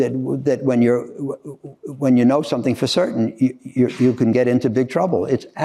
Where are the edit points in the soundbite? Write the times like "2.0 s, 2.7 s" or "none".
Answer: none